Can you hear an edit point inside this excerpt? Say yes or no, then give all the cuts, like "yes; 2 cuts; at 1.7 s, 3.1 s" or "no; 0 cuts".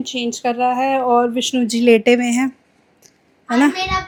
no; 0 cuts